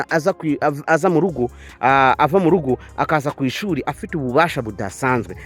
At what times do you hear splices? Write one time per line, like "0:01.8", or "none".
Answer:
none